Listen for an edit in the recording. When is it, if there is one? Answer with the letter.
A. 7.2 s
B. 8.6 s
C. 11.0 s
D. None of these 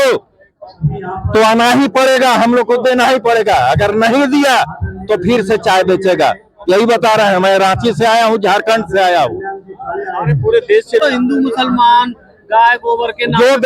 C